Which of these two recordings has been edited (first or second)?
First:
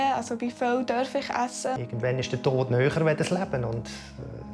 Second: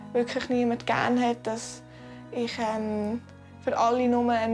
first